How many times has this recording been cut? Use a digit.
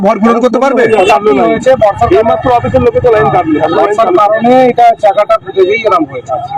1